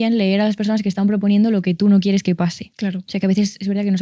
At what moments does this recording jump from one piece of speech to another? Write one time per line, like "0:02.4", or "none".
none